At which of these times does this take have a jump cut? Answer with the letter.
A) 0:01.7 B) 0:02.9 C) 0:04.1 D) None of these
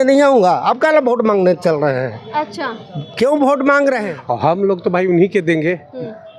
C